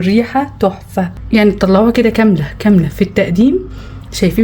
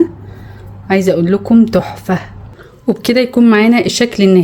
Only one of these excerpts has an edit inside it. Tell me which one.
first; 1 cut; at 1.2 s

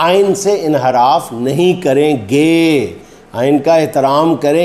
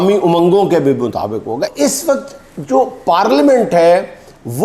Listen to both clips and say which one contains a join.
second; 1 cut; at 1.7 s

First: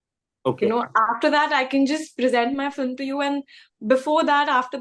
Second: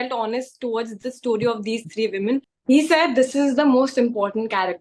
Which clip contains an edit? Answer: second; 1 cut; at 2.5 s

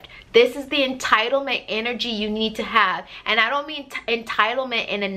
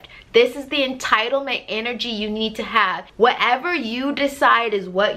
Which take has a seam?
second; 1 cut; at 3.0 s

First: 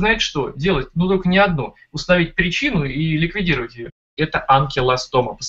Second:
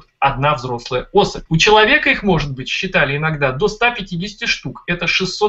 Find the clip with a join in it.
first; 1 cut; at 4.1 s

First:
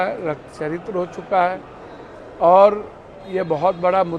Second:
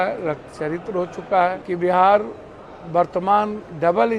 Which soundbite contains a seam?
second; 1 cut; at 1.6 s

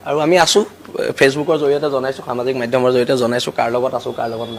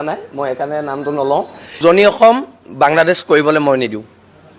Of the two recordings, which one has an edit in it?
second; 1 cut; at 1.6 s

